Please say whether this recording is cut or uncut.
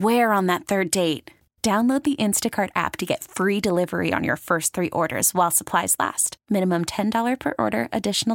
uncut